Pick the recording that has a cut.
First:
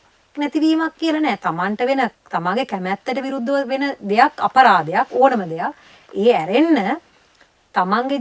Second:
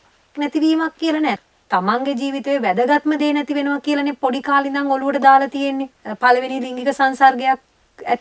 second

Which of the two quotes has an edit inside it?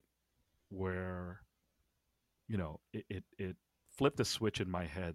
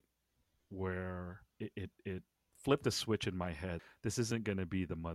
second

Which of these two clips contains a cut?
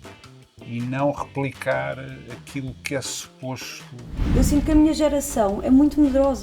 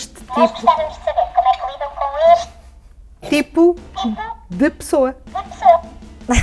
first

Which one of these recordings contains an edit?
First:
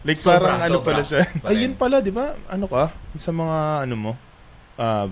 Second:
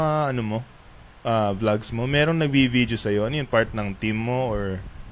first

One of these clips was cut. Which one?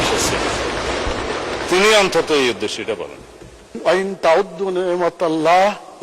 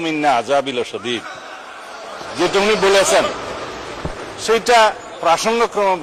first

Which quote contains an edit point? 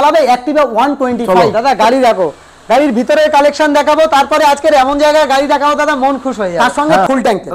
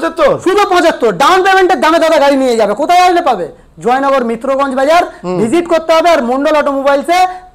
first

